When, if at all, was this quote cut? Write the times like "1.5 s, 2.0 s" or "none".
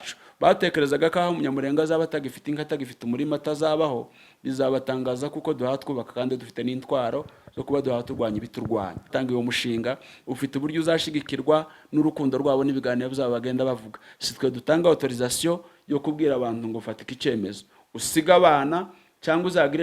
9.1 s